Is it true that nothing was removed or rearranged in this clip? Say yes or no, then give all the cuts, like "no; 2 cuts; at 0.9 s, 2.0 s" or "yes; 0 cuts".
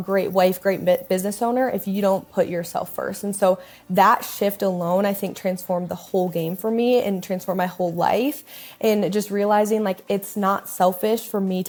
yes; 0 cuts